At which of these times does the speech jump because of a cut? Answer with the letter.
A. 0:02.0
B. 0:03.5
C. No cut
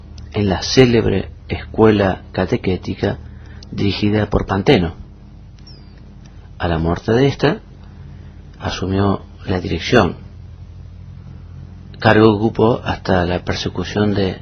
C